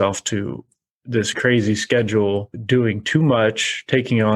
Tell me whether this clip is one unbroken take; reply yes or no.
no